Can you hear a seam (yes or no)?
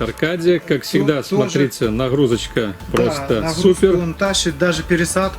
no